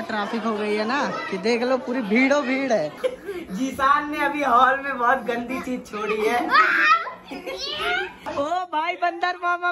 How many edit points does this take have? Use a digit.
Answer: 2